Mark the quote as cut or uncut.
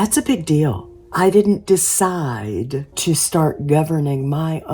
cut